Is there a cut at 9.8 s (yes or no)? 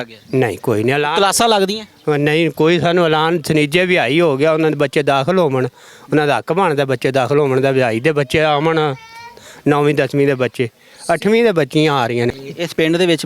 no